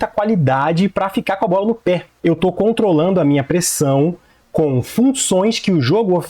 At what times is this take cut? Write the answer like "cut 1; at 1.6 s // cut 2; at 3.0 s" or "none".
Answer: cut 1; at 2.1 s